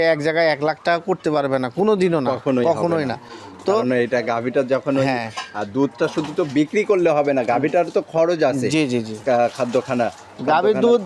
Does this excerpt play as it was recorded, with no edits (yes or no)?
yes